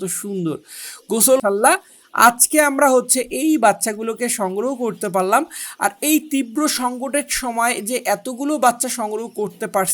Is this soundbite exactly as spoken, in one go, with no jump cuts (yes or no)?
no